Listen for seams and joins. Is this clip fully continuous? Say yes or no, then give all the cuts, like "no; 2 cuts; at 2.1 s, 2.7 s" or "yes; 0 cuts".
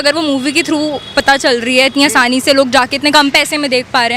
yes; 0 cuts